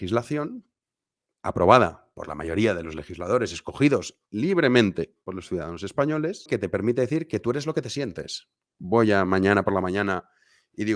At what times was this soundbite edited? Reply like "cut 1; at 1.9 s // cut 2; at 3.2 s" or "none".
cut 1; at 6.5 s // cut 2; at 8.8 s